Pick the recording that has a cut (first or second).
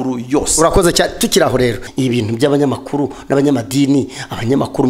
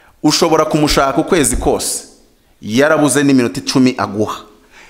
first